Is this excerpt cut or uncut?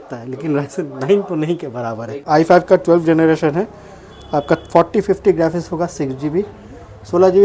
cut